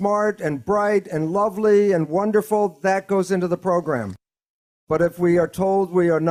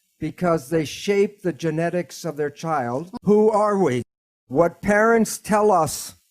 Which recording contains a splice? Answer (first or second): second